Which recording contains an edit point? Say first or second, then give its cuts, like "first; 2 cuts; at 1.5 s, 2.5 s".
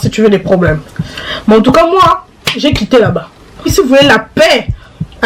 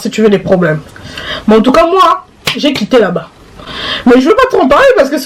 first; 1 cut; at 3.7 s